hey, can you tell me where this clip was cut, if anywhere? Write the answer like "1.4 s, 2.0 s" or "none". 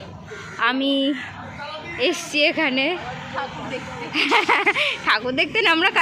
none